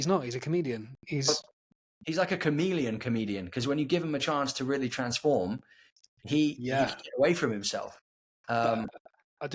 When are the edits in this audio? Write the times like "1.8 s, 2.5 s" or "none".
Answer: 1.7 s